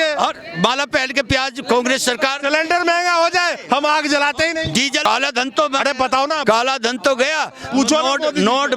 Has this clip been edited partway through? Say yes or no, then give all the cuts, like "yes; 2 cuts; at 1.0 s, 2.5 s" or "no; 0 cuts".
yes; 1 cut; at 5.1 s